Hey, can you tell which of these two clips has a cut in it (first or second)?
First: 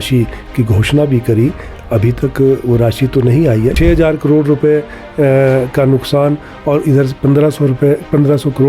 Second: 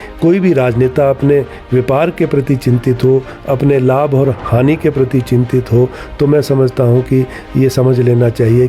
first